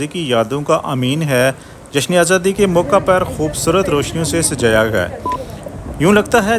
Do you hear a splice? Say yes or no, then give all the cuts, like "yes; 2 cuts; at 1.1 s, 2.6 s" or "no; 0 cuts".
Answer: no; 0 cuts